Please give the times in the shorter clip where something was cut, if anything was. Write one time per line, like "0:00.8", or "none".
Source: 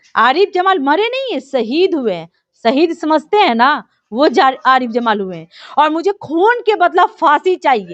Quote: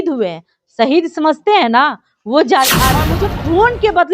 0:03.1